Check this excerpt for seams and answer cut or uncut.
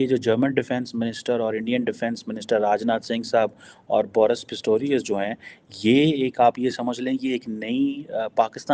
uncut